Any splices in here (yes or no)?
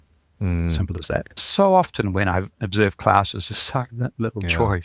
yes